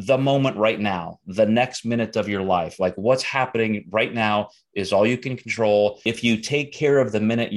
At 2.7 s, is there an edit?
no; 1 cut; at 6.1 s

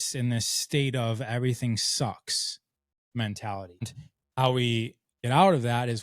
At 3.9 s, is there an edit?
yes; 1 cut; at 3.9 s

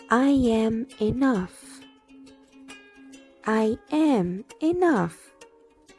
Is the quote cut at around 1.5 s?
yes; 3 cuts; at 1.5 s, 3.3 s, 5.1 s

